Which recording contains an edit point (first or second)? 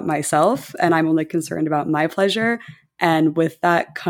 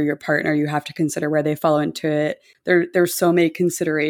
second